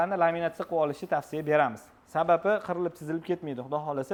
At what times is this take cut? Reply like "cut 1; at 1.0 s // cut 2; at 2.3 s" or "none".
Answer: none